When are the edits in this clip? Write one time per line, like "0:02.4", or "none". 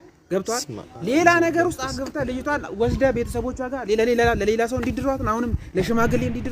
none

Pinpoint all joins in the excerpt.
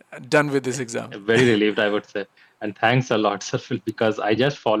none

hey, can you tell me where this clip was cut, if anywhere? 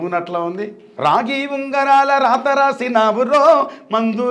0:00.9

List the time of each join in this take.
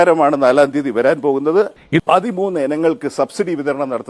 0:01.7

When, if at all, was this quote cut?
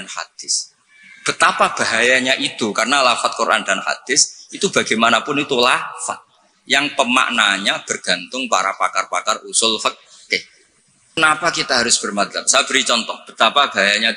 0:11.2

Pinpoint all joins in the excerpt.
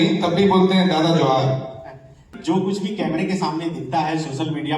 0:02.2

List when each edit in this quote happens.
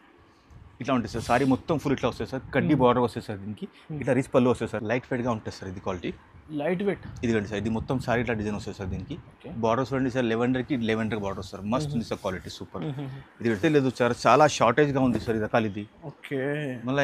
0:04.8
0:13.6

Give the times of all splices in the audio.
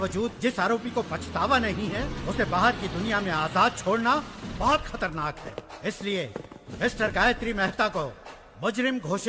none

